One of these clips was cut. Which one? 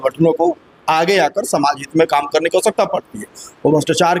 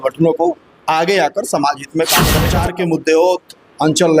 second; 1 cut; at 2.4 s

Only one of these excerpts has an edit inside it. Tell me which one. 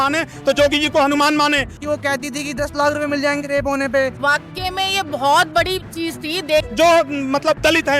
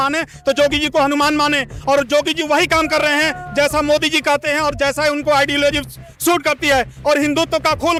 first; 3 cuts; at 1.8 s, 4.1 s, 6.7 s

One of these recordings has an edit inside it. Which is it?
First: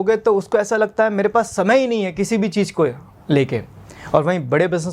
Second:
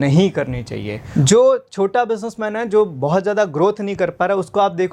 second; 1 cut; at 1.0 s

